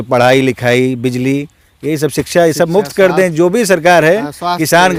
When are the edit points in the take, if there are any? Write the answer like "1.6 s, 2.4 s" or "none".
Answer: none